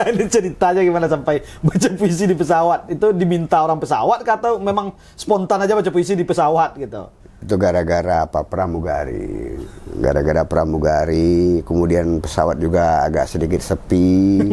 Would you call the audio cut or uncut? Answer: uncut